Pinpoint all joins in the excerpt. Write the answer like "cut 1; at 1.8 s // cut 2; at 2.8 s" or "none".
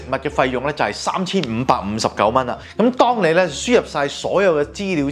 cut 1; at 2.6 s